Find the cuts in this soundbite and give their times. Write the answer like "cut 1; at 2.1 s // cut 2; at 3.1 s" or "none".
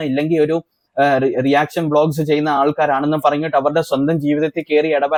none

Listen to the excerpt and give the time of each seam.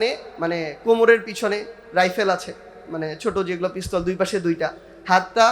none

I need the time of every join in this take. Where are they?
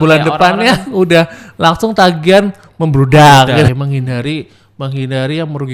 cut 1; at 3.7 s

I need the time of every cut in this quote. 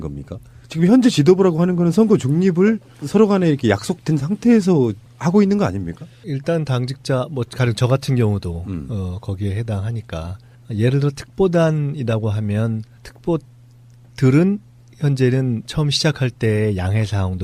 cut 1; at 15.2 s

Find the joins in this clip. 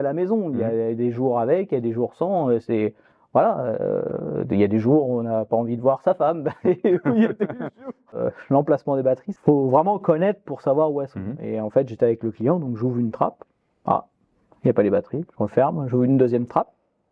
cut 1; at 8.2 s // cut 2; at 9.3 s

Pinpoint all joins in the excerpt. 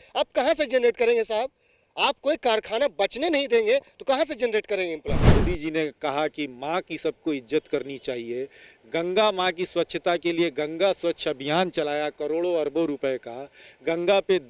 cut 1; at 5.3 s

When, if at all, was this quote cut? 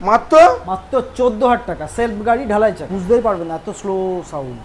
cut 1; at 2.9 s

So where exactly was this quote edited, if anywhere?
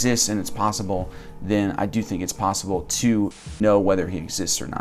cut 1; at 3.6 s

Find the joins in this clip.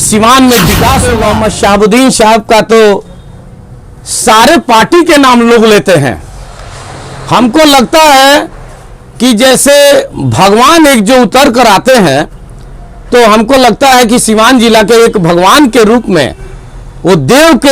cut 1; at 1.1 s

